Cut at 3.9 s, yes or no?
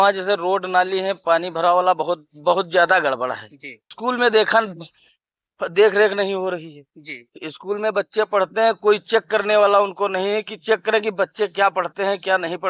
yes